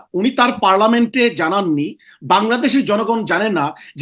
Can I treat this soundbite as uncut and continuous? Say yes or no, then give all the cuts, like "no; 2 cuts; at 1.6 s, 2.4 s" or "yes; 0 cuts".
yes; 0 cuts